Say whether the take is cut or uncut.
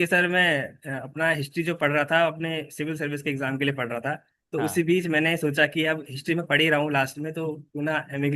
uncut